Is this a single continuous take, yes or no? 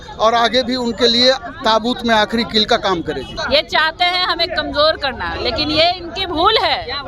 no